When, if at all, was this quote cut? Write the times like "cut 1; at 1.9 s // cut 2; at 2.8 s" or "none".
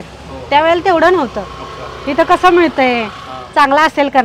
none